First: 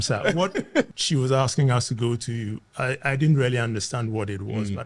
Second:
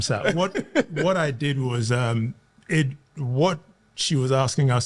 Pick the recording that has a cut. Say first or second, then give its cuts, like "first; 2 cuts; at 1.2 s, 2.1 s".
first; 1 cut; at 0.9 s